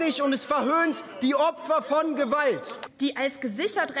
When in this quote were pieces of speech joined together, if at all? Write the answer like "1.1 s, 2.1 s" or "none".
2.8 s